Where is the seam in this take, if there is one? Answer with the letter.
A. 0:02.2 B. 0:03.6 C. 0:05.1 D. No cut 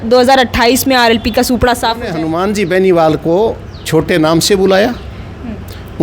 A